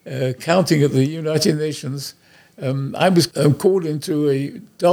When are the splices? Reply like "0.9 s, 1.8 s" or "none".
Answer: 3.3 s